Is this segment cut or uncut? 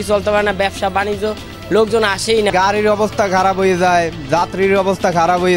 uncut